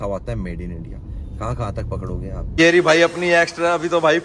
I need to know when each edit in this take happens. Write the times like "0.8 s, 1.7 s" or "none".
2.5 s